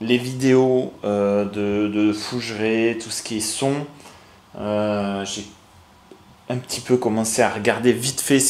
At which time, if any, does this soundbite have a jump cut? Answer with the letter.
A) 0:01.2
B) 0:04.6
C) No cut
C